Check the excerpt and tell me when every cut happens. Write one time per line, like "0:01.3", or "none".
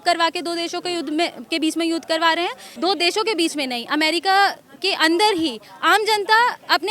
0:02.6